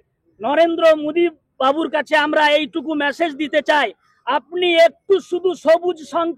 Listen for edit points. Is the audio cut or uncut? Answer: uncut